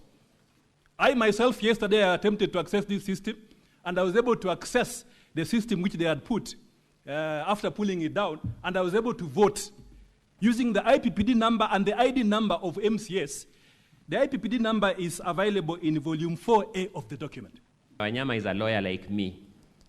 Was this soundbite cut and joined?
yes; 1 cut; at 18.0 s

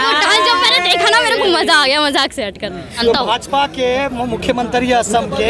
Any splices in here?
yes; 1 cut; at 2.9 s

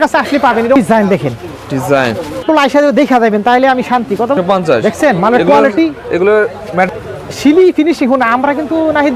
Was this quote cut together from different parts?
yes; 4 cuts; at 0.8 s, 2.4 s, 4.4 s, 6.9 s

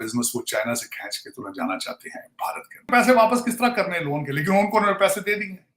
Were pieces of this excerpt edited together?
yes; 1 cut; at 2.9 s

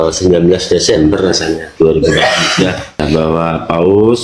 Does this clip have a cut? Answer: yes; 1 cut; at 3.0 s

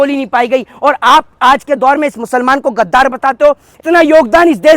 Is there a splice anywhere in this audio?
yes; 1 cut; at 3.7 s

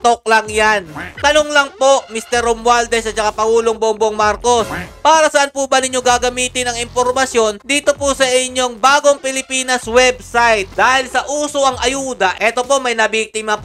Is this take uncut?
no; 2 cuts; at 1.1 s, 10.7 s

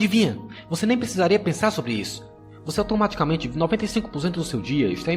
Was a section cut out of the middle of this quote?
no; 0 cuts

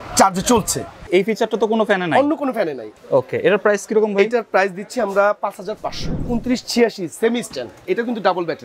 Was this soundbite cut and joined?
yes; 4 cuts; at 1.1 s, 2.9 s, 6.2 s, 7.7 s

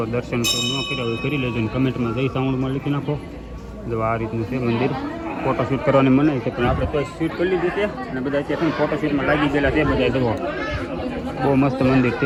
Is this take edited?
no; 0 cuts

